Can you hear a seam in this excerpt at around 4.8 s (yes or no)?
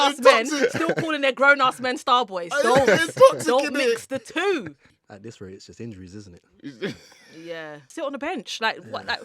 yes